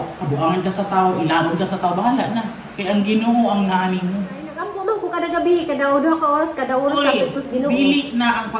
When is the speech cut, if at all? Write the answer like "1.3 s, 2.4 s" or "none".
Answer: 4.7 s

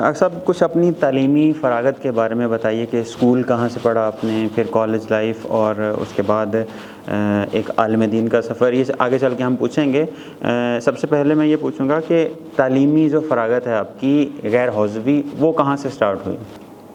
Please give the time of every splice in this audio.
none

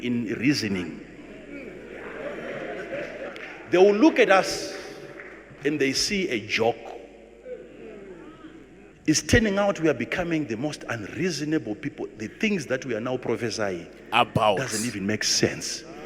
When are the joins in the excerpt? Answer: 8.9 s

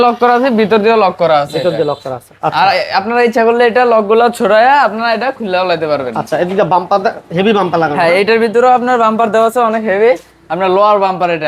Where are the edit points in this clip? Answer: none

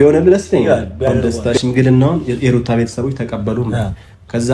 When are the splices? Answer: 1.3 s

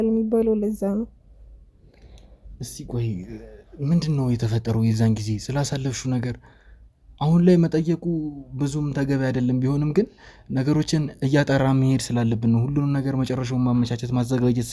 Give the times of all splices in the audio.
none

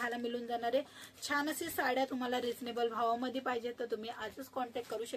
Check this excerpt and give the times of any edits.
none

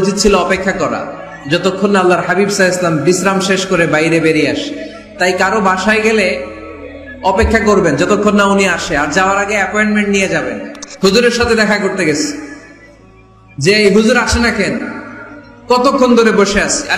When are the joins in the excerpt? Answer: 10.8 s

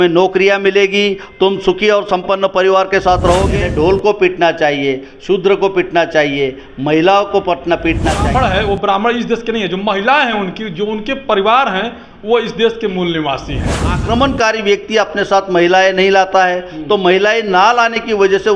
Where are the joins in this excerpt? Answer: 3.5 s, 8.3 s, 14.0 s

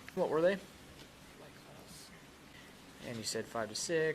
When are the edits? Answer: 2.6 s

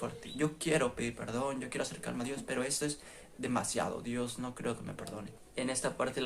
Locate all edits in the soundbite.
5.3 s

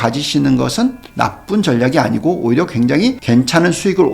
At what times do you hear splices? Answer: 3.2 s

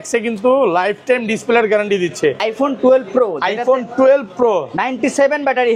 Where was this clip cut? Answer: 2.4 s

